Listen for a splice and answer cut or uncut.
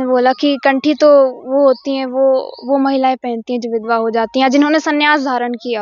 uncut